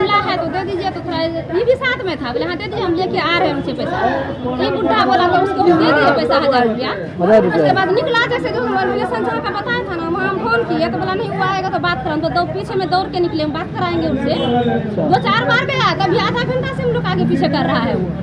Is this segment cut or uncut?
uncut